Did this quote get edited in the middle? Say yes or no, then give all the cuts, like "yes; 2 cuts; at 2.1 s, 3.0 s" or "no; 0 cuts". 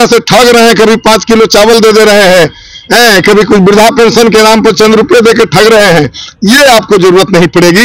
no; 0 cuts